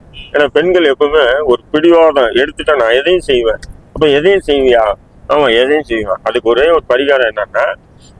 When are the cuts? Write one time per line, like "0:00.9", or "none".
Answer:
none